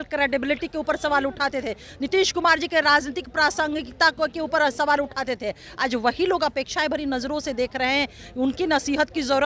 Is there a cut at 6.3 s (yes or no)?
no